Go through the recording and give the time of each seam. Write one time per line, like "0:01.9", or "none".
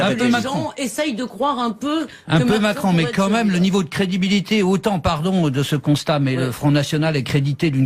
0:02.2